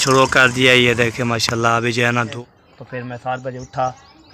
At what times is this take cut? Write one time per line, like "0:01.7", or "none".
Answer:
0:02.3